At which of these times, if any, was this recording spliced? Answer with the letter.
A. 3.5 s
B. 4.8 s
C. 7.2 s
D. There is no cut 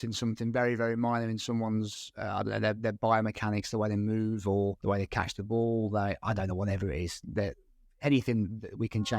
B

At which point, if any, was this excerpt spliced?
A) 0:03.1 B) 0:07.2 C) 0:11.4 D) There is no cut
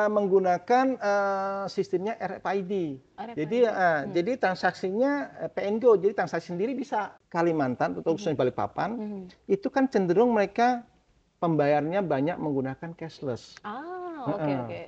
B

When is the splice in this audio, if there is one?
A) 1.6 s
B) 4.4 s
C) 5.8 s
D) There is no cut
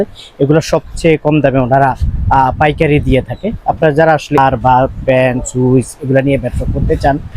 B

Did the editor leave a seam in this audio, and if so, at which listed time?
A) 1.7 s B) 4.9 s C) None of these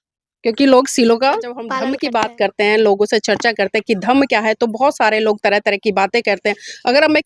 A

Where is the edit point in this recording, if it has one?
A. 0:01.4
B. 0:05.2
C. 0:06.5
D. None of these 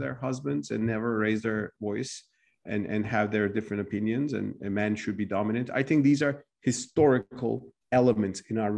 D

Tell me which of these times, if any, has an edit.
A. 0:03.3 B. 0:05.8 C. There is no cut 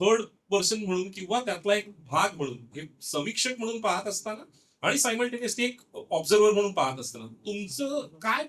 C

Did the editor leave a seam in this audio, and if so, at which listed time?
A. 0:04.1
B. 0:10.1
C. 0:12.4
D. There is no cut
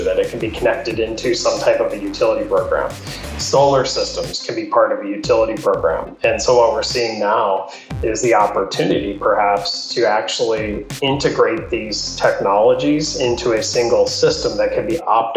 D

